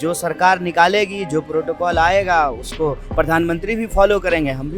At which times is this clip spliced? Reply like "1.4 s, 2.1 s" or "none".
none